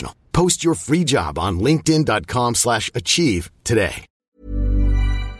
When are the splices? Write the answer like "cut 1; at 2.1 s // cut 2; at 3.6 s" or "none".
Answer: cut 1; at 4.1 s

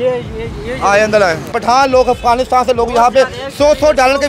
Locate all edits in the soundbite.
cut 1; at 1.5 s

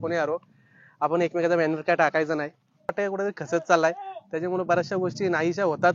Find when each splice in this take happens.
cut 1; at 2.9 s

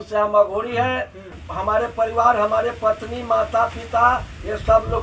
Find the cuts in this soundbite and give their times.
cut 1; at 1.3 s

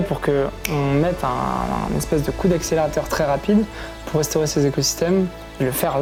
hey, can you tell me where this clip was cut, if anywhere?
none

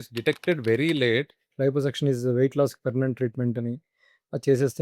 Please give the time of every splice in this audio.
cut 1; at 1.4 s

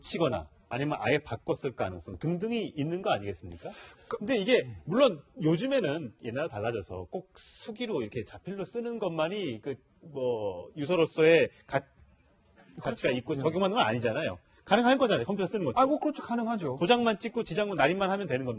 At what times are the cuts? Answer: none

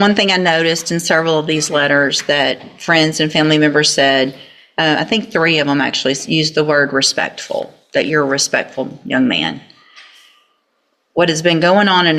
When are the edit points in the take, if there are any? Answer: none

